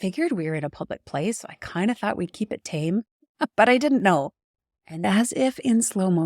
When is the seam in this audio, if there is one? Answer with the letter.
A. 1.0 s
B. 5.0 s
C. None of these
B